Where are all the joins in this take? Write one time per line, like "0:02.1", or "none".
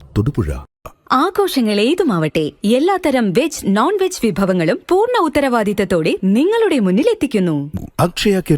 0:00.9
0:07.7